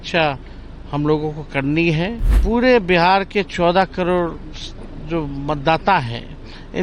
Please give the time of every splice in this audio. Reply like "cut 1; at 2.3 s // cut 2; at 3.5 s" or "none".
cut 1; at 2.3 s

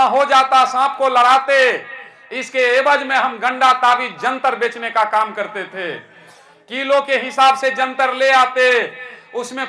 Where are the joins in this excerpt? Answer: none

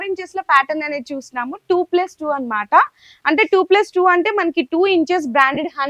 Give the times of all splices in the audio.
none

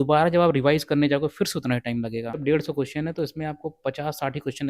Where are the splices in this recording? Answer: cut 1; at 2.4 s

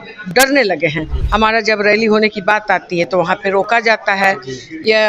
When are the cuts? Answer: cut 1; at 1.1 s

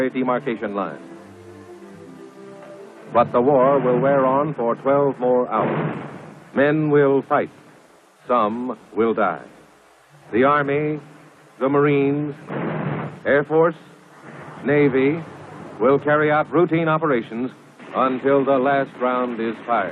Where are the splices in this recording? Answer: none

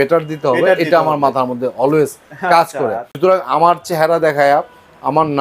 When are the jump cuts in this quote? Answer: cut 1; at 3.0 s

